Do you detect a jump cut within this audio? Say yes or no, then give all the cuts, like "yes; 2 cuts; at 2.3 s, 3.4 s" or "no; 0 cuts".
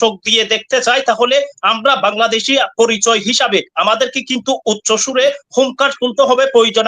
no; 0 cuts